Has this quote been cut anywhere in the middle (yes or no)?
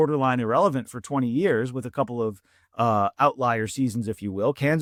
no